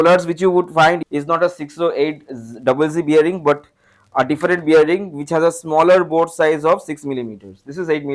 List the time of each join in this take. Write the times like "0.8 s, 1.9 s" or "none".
1.0 s